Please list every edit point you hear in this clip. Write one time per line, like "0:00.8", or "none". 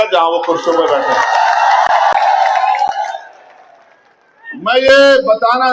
0:02.2

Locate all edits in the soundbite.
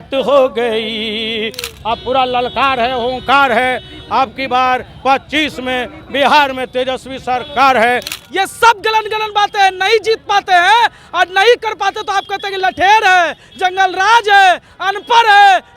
0:01.7
0:08.1

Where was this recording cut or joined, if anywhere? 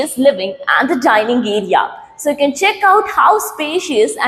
none

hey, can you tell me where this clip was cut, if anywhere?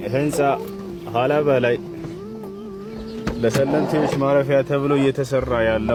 none

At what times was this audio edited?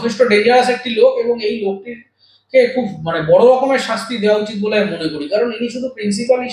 none

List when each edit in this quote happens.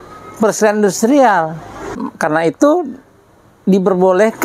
0:02.1

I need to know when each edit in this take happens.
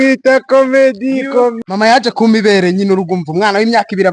0:01.6

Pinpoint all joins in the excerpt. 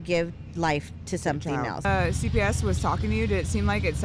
0:01.8

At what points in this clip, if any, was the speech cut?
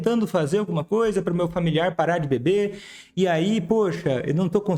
none

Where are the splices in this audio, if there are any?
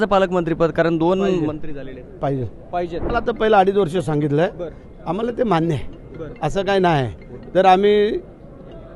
0:03.1

